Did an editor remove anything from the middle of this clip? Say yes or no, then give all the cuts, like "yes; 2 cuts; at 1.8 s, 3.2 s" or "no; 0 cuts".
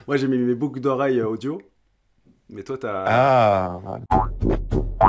yes; 1 cut; at 3.9 s